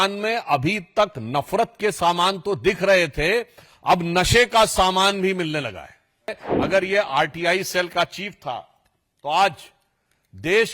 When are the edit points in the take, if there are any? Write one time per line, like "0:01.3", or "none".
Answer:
0:06.4